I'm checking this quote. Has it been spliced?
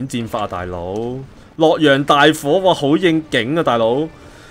no; 0 cuts

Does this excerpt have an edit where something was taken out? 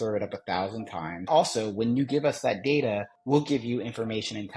yes; 2 cuts; at 1.3 s, 3.1 s

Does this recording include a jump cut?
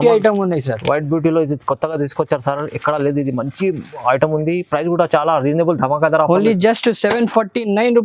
no; 0 cuts

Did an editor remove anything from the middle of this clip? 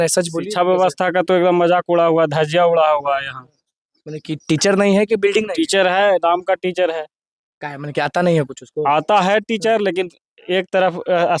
no; 0 cuts

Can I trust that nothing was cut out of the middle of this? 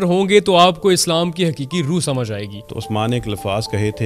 no; 1 cut; at 2.6 s

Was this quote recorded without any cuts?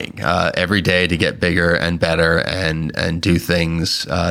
yes; 0 cuts

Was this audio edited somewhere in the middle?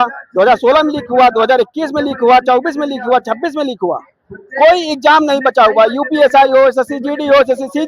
no; 0 cuts

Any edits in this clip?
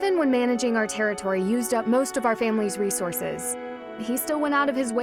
no; 0 cuts

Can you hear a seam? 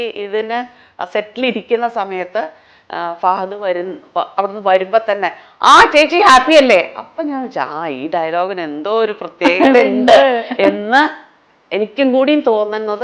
no; 0 cuts

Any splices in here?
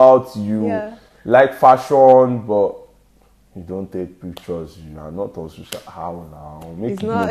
no; 0 cuts

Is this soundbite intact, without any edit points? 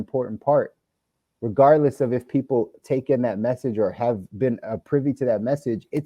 yes; 0 cuts

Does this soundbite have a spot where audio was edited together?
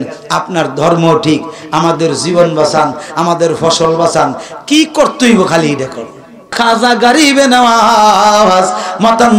yes; 1 cut; at 6.5 s

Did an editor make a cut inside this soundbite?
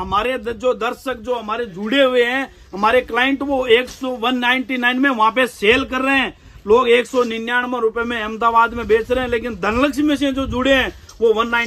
no; 0 cuts

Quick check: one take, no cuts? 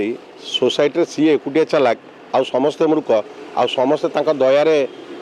yes; 0 cuts

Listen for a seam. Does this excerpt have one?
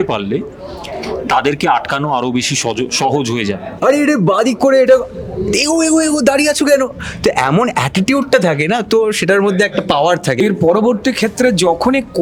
yes; 2 cuts; at 3.7 s, 10.4 s

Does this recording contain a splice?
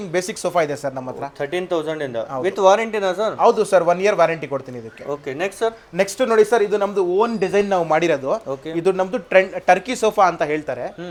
no; 0 cuts

